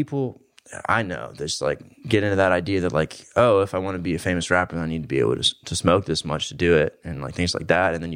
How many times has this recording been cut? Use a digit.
0